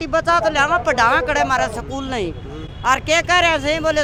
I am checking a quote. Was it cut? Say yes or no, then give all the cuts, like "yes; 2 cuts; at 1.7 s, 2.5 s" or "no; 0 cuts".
no; 0 cuts